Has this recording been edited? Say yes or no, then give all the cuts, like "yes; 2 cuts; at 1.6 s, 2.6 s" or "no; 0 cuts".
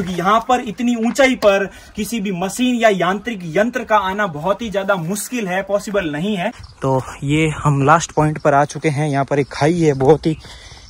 yes; 1 cut; at 6.7 s